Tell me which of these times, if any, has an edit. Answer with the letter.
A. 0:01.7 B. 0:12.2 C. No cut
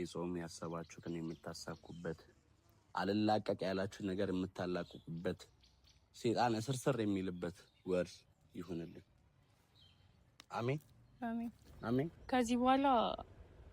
B